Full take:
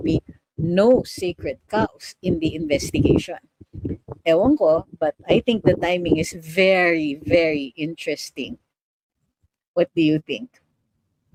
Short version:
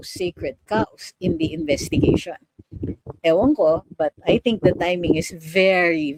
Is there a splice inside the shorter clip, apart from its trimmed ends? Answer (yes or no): no